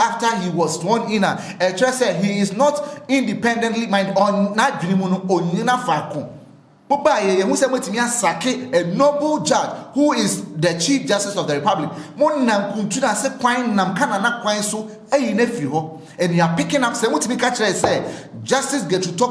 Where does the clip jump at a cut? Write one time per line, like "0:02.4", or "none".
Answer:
0:06.7